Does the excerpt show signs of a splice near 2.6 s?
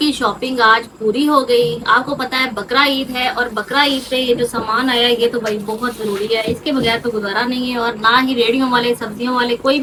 no; 0 cuts

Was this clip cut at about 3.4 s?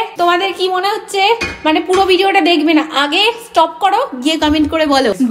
no; 0 cuts

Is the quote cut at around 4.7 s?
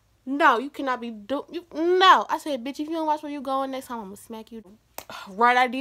yes; 1 cut; at 4.7 s

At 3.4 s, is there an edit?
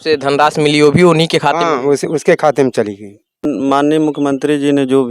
yes; 1 cut; at 3.4 s

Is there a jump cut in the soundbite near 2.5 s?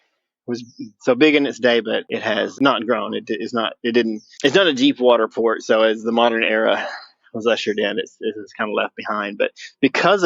yes; 1 cut; at 2.5 s

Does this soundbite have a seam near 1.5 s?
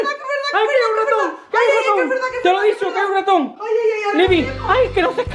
no; 0 cuts

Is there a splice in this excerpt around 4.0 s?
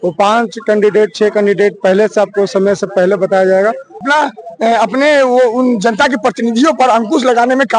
yes; 1 cut; at 4.0 s

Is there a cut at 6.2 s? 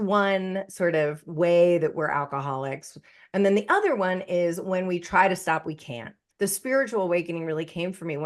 yes; 1 cut; at 6.2 s

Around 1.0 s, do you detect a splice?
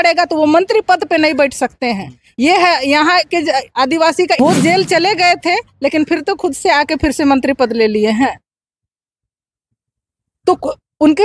no; 1 cut; at 4.4 s

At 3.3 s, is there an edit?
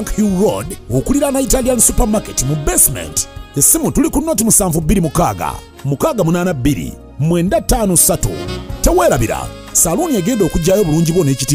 no; 0 cuts

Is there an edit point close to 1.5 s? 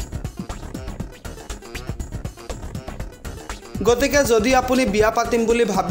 no; 0 cuts

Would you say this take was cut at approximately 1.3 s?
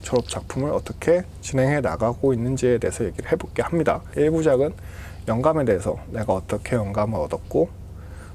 no; 1 cut; at 4.1 s

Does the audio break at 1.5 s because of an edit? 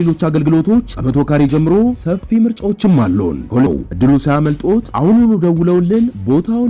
no; 1 cut; at 3.7 s

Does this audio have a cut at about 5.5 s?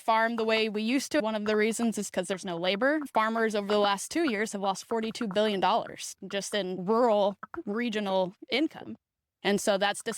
no; 3 cuts; at 1.2 s, 3.1 s, 6.8 s

